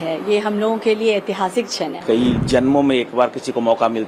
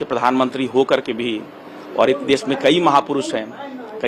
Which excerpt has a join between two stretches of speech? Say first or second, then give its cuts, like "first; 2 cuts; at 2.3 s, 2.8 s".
first; 1 cut; at 2.0 s